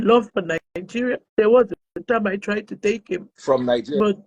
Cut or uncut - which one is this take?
cut